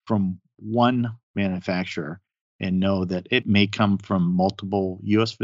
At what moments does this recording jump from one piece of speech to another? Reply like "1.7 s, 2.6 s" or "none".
3.4 s